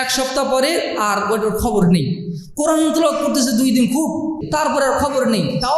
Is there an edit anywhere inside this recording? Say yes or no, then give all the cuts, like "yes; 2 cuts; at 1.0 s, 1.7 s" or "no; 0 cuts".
yes; 1 cut; at 4.4 s